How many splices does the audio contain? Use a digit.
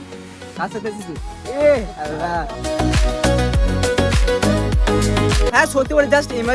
1